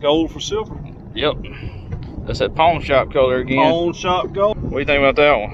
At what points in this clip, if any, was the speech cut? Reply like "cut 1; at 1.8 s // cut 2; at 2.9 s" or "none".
cut 1; at 4.5 s